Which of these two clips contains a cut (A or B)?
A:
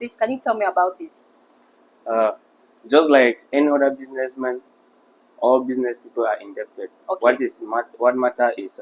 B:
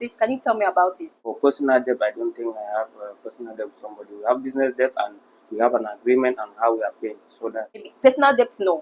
B